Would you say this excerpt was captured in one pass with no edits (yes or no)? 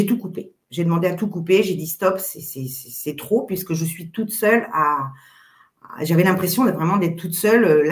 yes